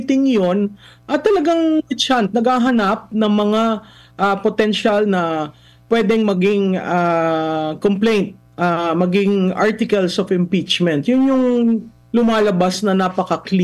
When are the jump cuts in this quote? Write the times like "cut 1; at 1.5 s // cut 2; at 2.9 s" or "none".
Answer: none